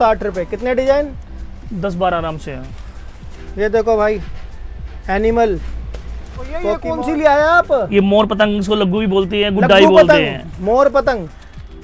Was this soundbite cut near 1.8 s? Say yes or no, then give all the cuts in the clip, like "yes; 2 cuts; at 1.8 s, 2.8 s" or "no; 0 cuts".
no; 1 cut; at 6.9 s